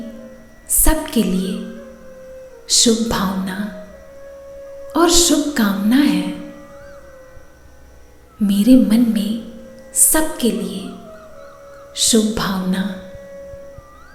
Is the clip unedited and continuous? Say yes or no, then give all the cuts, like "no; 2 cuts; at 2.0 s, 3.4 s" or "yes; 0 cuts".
yes; 0 cuts